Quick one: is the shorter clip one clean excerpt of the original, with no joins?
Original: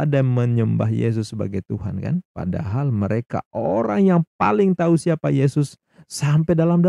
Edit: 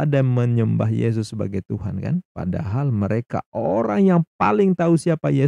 yes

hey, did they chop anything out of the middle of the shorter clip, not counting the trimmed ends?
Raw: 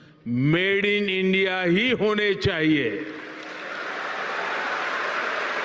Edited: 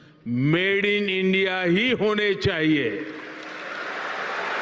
no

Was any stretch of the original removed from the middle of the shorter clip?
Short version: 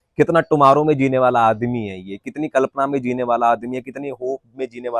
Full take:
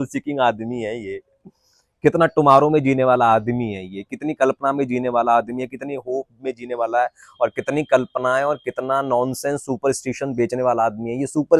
no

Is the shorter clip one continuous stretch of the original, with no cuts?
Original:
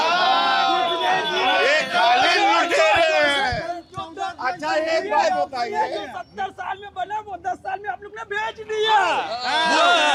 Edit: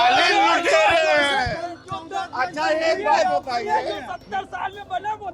yes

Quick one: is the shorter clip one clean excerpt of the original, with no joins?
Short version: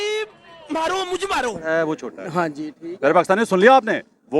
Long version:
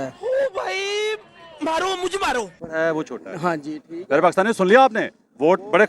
no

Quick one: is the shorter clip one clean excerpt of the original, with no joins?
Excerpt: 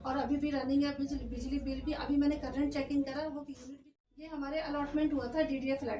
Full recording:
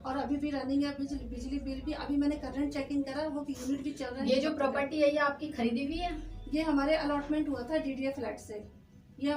no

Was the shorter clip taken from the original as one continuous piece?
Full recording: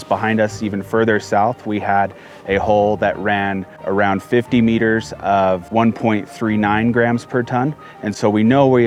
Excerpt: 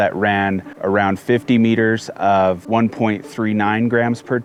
yes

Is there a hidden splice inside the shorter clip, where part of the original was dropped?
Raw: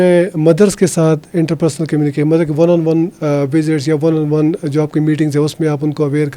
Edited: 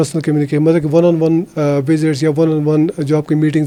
no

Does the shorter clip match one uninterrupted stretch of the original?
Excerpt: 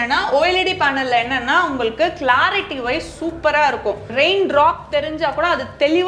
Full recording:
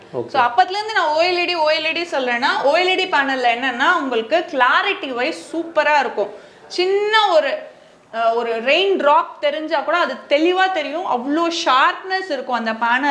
no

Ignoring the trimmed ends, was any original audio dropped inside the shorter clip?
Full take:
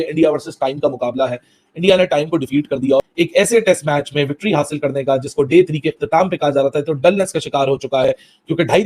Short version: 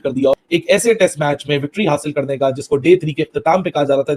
no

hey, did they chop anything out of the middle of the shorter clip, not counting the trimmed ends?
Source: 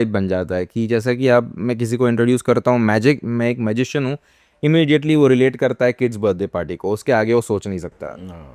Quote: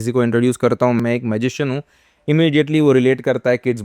yes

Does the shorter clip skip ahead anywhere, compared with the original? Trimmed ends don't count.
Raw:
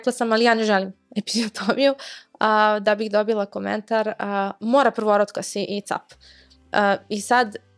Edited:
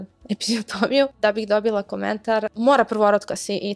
yes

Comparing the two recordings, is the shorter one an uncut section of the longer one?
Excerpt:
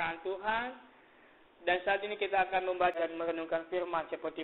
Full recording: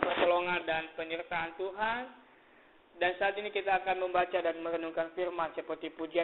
no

